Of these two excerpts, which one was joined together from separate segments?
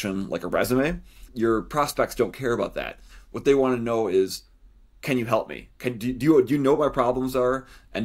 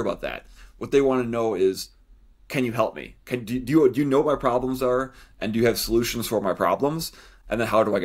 first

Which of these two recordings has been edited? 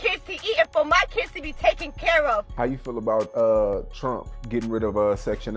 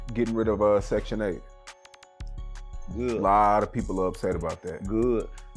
first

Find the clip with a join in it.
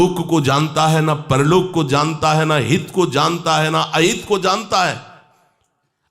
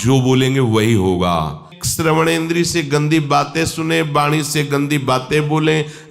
second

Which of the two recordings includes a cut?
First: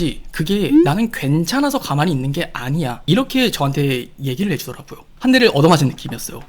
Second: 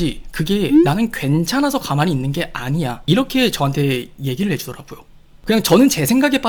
first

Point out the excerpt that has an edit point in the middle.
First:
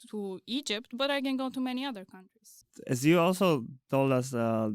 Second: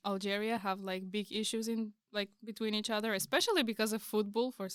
first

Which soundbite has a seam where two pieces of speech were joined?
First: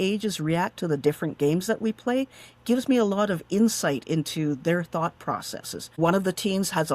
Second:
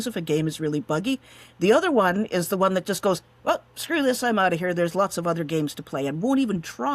first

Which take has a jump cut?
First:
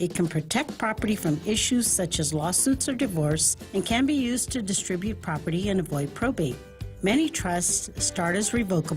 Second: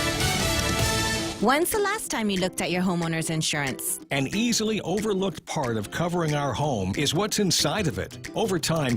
second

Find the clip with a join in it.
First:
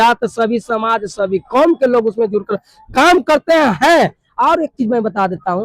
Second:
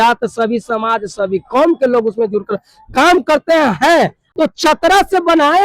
second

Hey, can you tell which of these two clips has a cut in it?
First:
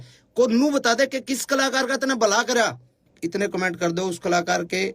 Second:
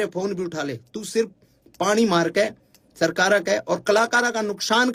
first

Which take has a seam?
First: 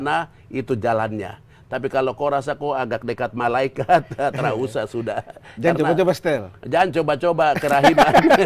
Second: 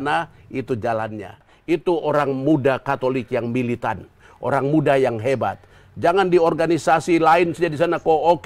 second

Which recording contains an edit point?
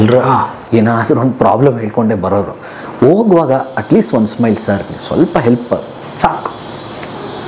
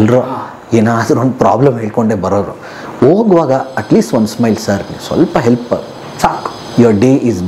second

